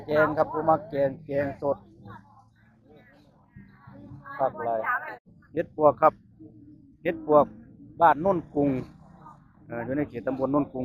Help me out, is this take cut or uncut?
cut